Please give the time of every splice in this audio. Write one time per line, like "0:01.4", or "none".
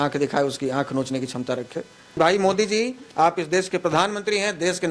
0:02.2